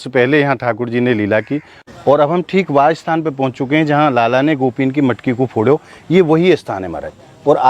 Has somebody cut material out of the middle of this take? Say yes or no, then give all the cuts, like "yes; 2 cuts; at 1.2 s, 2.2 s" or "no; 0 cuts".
yes; 1 cut; at 1.8 s